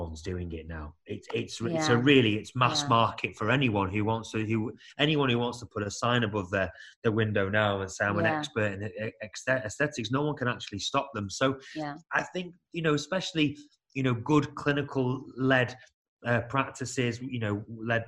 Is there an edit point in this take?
no; 0 cuts

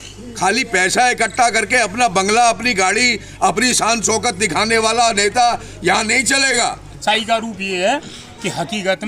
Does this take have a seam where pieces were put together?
yes; 1 cut; at 6.9 s

